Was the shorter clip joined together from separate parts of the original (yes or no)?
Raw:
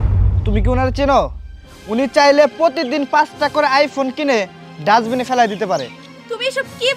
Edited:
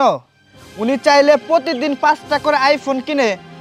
no